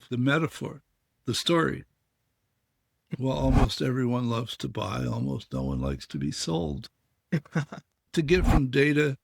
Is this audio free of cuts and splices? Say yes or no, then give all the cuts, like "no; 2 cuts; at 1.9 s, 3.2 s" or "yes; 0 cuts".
no; 2 cuts; at 3.0 s, 8.1 s